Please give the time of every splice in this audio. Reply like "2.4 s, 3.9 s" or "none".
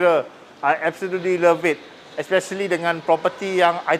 none